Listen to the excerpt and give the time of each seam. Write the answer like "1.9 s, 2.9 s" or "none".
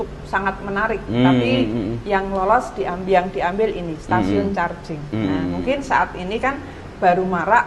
none